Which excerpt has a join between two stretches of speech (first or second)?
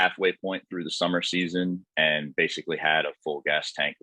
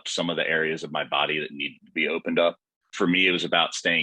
second